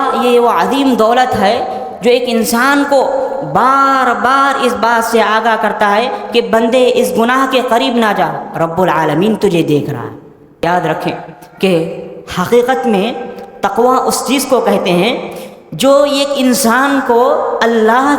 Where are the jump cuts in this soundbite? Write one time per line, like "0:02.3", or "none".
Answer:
0:10.6